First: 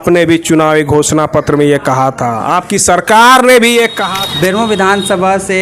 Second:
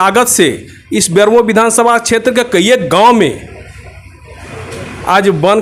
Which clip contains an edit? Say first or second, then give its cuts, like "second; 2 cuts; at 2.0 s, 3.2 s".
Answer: first; 1 cut; at 4.0 s